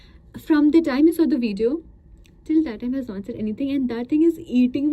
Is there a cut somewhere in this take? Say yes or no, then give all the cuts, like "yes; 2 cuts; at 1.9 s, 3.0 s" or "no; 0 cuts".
no; 0 cuts